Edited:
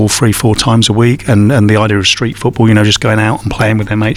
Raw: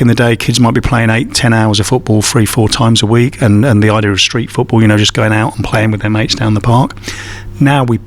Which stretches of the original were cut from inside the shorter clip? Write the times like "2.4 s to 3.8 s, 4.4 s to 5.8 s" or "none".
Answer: none